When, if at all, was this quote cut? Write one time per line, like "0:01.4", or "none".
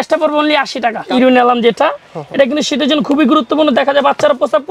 0:01.1

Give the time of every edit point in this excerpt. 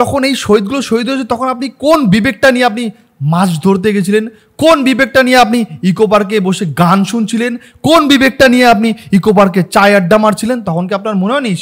none

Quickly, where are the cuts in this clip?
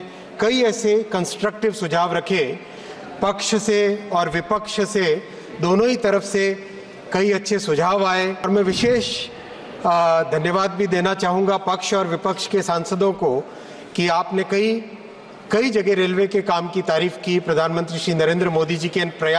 0:08.4

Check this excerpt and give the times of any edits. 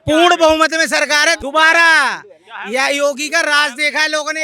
0:01.4

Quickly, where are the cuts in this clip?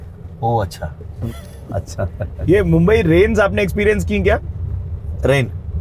0:01.2
0:02.4

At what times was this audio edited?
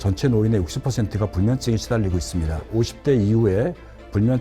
0:02.7

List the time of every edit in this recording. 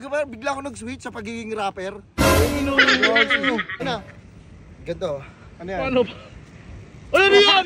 0:03.8

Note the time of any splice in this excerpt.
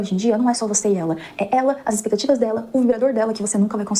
none

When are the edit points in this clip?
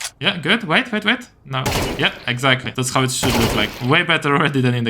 0:02.7

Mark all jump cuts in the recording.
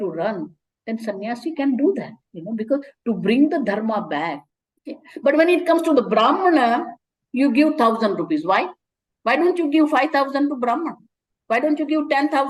0:04.4

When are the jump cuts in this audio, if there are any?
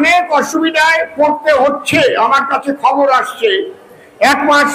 none

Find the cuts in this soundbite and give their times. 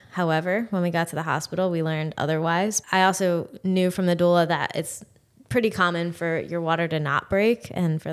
0:02.8

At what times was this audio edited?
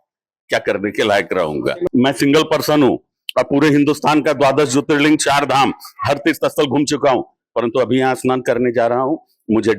0:01.8

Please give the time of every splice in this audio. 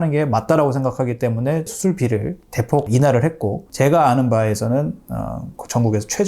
0:01.7
0:03.7

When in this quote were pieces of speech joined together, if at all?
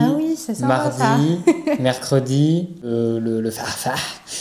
0:02.9

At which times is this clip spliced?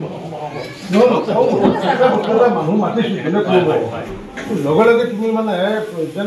none

